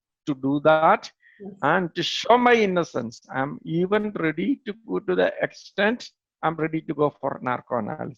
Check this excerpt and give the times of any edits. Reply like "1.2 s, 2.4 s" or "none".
none